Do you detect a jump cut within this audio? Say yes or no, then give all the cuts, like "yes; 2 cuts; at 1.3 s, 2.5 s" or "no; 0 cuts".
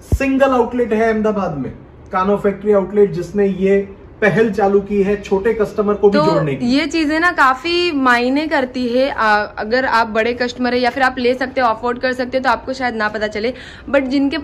no; 0 cuts